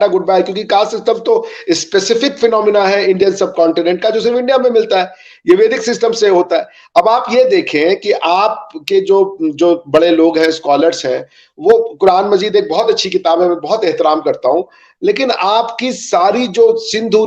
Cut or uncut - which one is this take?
uncut